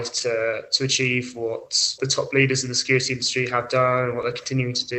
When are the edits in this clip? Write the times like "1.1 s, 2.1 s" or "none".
1.9 s